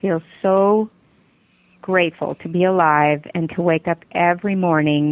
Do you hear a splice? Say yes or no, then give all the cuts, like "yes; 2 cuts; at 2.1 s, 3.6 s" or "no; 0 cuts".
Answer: no; 0 cuts